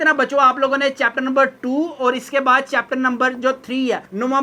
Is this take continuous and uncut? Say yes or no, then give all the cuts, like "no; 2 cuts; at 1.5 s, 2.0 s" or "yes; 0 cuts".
yes; 0 cuts